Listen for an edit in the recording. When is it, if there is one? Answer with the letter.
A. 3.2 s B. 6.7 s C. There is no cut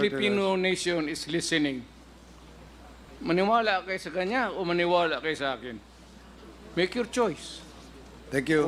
C